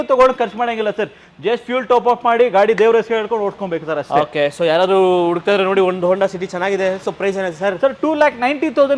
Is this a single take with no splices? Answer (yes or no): yes